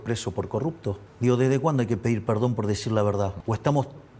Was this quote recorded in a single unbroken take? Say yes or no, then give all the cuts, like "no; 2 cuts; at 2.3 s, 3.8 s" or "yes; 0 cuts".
no; 2 cuts; at 1.1 s, 3.4 s